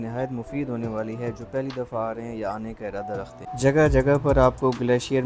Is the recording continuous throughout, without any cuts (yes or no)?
no